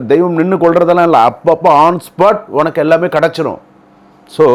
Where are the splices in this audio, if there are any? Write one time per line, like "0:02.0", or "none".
none